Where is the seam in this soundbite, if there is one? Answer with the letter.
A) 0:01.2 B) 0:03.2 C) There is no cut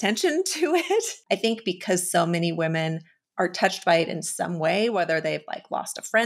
A